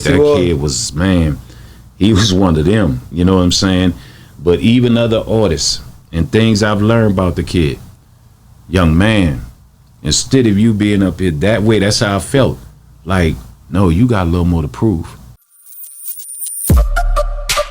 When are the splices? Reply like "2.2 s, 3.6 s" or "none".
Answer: 15.5 s